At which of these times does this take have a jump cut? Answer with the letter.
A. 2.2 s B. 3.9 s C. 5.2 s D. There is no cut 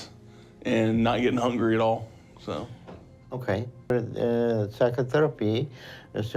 D